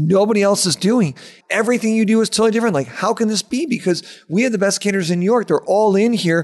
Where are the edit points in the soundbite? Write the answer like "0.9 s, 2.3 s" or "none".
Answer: 1.3 s